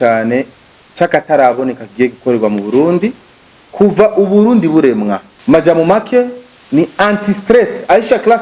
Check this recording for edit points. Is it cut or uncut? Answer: cut